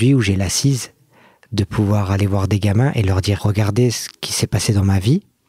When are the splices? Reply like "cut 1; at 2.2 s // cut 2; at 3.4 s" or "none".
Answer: cut 1; at 3.4 s